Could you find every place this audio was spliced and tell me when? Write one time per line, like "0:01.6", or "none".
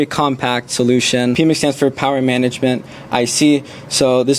0:01.4